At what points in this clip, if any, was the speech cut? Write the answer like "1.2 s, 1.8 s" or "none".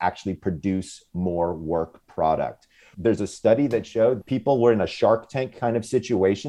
2.9 s, 4.2 s